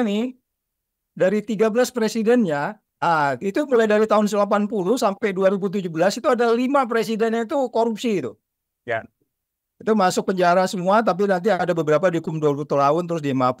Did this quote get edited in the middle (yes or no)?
yes